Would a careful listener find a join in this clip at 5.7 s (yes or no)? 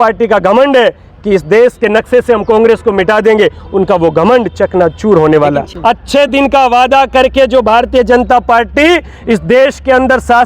yes